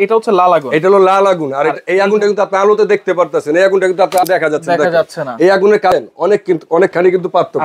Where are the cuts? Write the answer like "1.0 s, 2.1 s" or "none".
4.2 s